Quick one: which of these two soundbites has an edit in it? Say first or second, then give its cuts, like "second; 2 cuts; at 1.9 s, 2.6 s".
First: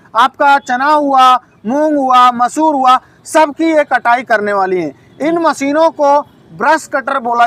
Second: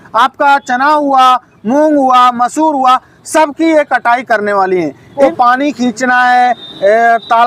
second; 1 cut; at 5.1 s